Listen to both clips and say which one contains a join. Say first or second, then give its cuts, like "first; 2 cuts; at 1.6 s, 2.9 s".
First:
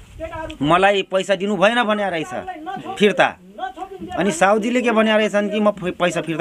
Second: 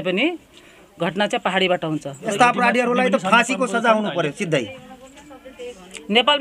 second; 1 cut; at 2.3 s